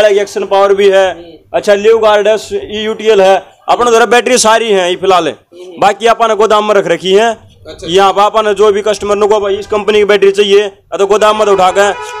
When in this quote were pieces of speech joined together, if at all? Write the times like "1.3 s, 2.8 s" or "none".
none